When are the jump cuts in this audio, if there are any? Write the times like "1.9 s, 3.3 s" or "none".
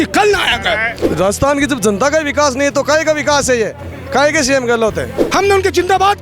0.9 s, 5.1 s